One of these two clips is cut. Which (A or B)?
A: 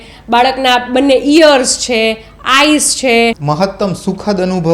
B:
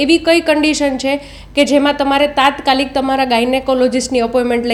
A